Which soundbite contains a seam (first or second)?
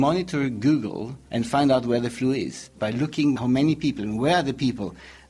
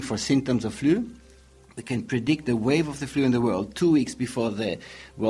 first